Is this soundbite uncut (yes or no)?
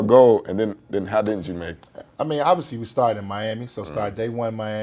yes